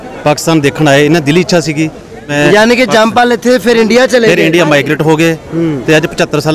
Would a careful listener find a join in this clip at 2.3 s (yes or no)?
yes